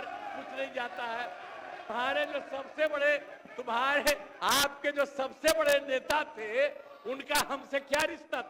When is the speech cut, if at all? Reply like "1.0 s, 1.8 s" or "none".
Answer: 1.8 s